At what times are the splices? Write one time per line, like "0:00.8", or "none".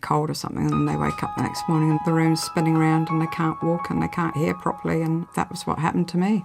0:05.3